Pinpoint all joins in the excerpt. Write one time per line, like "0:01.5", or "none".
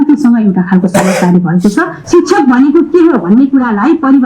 0:02.0